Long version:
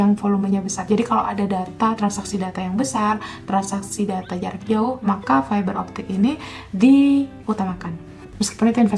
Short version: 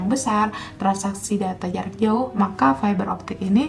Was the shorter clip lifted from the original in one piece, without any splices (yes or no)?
yes